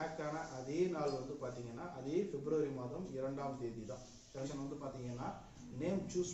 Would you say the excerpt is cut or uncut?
cut